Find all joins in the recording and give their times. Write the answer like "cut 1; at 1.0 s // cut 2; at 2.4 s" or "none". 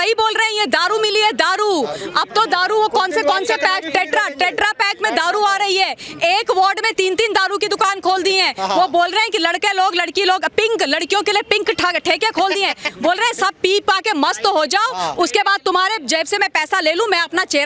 none